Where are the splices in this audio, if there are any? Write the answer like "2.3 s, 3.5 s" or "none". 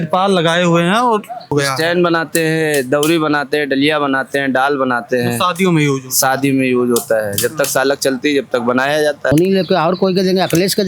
1.5 s, 9.3 s

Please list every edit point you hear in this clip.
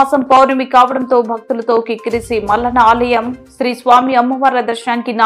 none

